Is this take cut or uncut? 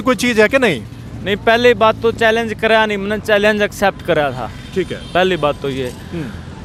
uncut